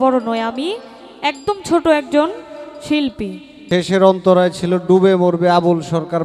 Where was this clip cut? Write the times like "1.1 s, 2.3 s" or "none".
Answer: 3.5 s